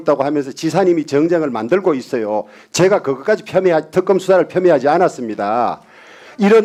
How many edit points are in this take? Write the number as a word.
zero